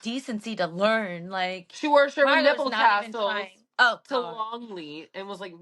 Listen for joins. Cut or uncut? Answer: uncut